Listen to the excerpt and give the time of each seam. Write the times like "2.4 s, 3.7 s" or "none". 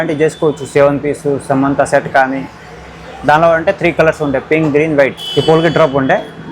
5.2 s